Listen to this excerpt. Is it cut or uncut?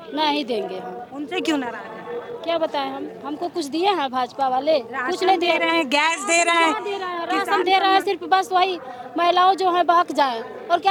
uncut